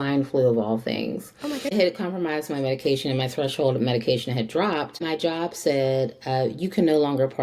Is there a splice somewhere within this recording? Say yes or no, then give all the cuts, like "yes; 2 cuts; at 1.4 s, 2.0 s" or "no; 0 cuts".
yes; 2 cuts; at 1.7 s, 5.0 s